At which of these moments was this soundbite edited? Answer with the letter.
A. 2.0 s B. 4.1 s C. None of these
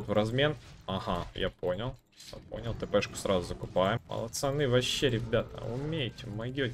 B